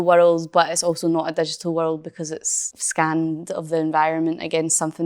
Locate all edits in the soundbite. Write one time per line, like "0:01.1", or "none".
0:02.8